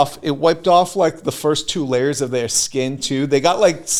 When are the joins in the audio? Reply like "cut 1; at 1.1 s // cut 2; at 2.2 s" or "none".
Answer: none